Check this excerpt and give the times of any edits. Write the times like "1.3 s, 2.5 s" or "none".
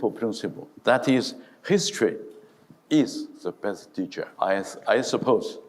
4.2 s

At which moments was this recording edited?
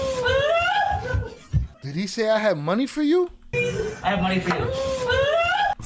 none

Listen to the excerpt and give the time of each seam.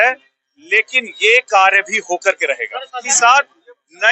3.0 s

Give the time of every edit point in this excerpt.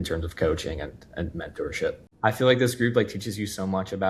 2.1 s

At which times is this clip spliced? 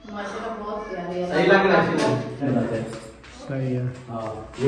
2.4 s

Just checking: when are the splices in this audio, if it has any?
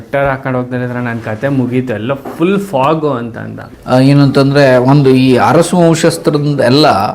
3.7 s

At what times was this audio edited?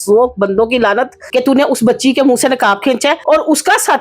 1.2 s, 3.2 s

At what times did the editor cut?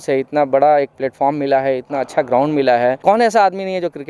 3.0 s

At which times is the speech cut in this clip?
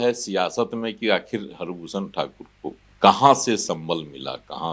2.9 s

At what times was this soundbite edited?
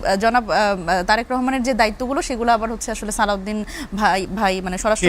none

